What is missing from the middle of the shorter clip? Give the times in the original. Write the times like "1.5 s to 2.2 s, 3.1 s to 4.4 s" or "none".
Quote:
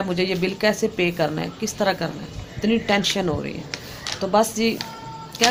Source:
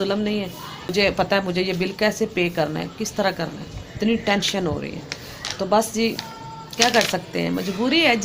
none